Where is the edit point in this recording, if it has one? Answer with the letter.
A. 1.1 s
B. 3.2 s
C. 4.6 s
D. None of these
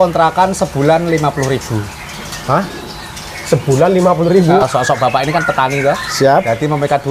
C